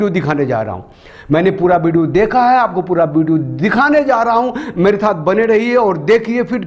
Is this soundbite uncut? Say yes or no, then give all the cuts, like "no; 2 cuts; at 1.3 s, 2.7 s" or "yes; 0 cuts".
yes; 0 cuts